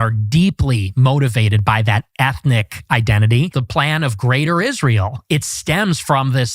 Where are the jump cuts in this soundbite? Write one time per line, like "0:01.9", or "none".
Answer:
0:03.6
0:05.2